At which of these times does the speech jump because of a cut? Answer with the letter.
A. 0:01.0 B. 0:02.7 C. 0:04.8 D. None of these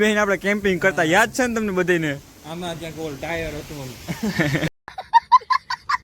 C